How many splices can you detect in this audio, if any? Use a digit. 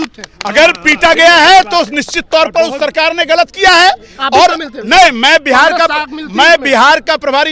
0